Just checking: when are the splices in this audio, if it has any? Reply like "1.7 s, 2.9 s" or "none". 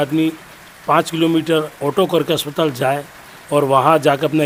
none

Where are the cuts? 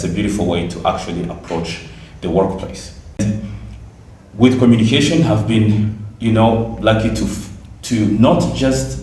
3.2 s

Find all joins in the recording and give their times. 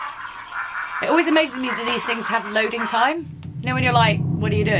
1.0 s

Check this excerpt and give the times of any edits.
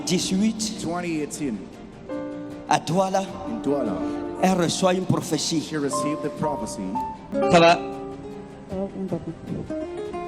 7.3 s

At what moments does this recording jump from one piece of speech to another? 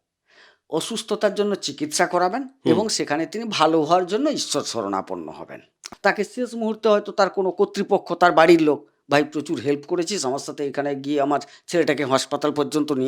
5.9 s

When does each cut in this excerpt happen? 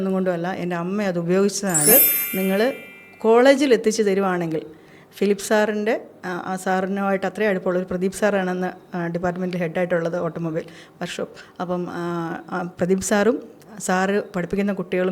1.8 s

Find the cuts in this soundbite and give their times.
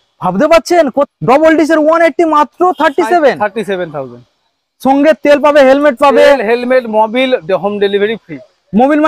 1.1 s

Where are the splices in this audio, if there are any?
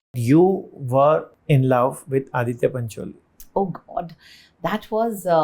1.3 s

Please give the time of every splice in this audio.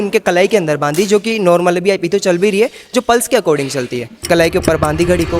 4.2 s

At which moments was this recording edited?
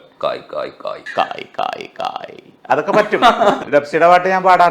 1.0 s, 3.6 s

